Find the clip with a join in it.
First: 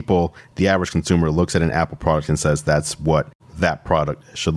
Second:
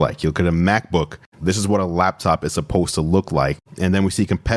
second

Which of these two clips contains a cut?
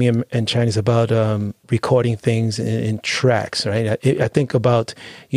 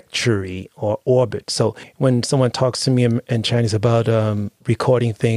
second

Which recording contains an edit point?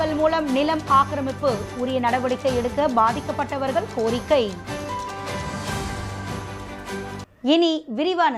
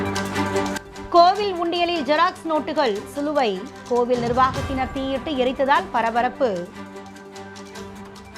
first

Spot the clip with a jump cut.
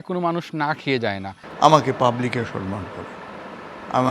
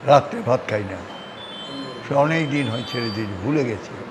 first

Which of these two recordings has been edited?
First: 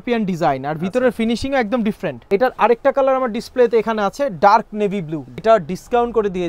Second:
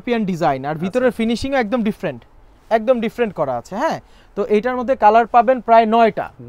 first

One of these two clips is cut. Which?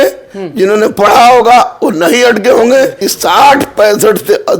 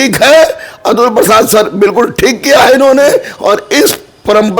first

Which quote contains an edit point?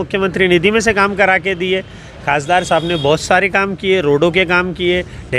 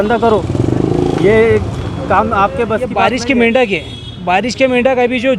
second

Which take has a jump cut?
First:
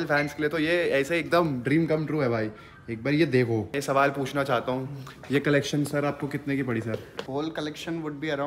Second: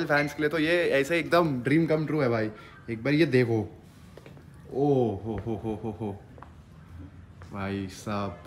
first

